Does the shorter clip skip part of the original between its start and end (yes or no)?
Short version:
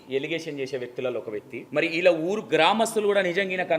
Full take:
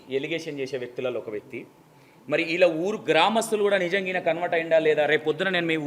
yes